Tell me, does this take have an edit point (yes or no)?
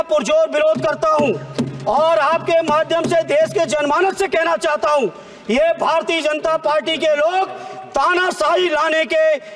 no